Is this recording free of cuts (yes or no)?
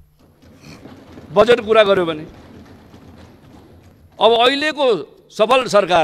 yes